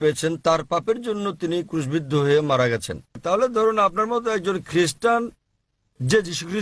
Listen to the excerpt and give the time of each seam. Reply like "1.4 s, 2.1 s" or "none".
3.2 s